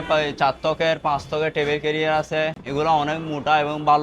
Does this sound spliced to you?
no; 0 cuts

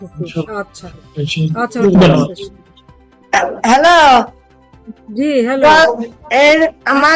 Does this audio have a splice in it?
yes; 1 cut; at 3.2 s

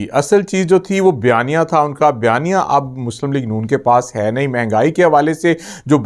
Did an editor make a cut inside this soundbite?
no; 0 cuts

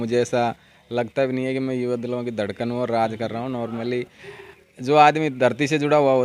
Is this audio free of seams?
yes; 0 cuts

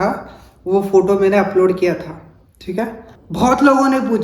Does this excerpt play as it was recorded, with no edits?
no; 1 cut; at 3.1 s

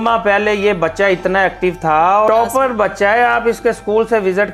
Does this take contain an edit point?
yes; 1 cut; at 2.3 s

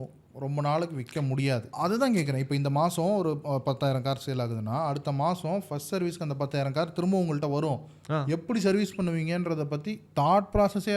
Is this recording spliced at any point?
yes; 1 cut; at 1.7 s

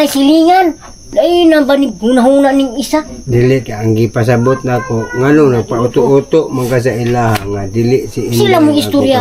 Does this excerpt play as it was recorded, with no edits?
no; 1 cut; at 1.0 s

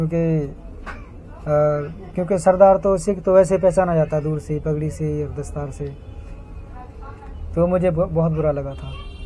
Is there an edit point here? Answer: no; 0 cuts

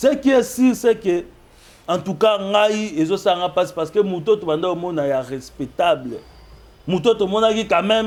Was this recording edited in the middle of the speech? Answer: no; 0 cuts

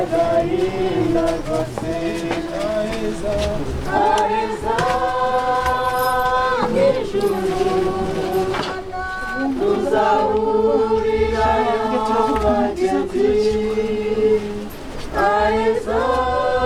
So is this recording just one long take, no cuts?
yes; 0 cuts

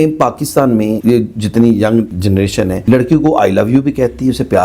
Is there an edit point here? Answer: yes; 2 cuts; at 1.0 s, 2.3 s

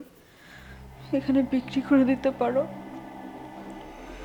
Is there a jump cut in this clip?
yes; 1 cut; at 2.7 s

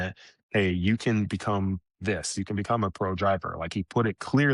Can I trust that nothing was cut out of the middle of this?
yes; 0 cuts

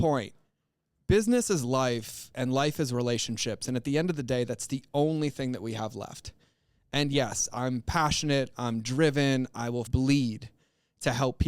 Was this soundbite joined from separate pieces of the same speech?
yes; 1 cut; at 9.9 s

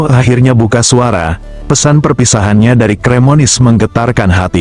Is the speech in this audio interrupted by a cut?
no; 0 cuts

